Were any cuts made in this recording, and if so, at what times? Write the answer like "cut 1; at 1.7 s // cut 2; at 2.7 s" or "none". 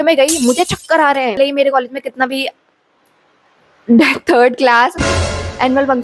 cut 1; at 1.3 s